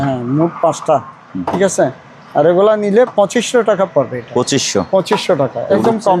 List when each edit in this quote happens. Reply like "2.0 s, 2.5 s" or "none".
none